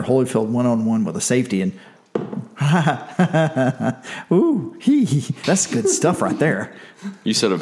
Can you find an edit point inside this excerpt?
yes; 1 cut; at 5.3 s

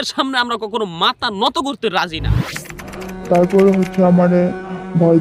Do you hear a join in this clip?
yes; 1 cut; at 2.5 s

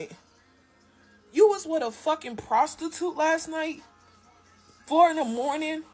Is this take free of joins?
yes; 0 cuts

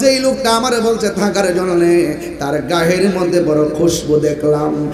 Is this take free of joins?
yes; 0 cuts

